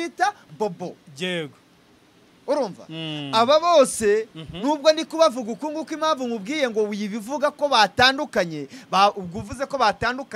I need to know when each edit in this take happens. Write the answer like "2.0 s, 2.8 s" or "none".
none